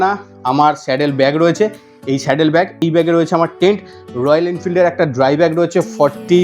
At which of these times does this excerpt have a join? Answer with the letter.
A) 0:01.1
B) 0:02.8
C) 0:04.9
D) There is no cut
B